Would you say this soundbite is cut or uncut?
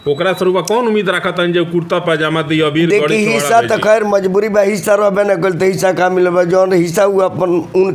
uncut